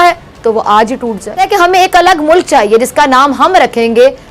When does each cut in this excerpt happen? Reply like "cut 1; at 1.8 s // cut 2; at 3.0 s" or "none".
cut 1; at 1.4 s